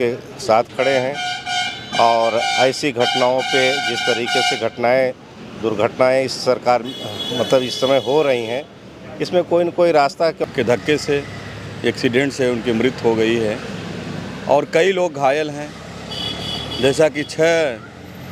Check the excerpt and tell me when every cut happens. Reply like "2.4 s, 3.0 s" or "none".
10.4 s